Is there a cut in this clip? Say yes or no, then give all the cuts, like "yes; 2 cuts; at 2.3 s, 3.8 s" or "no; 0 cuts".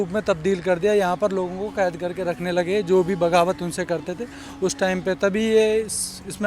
no; 0 cuts